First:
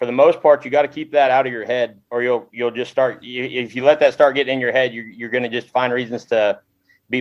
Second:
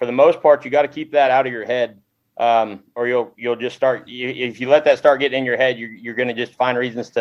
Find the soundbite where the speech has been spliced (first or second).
first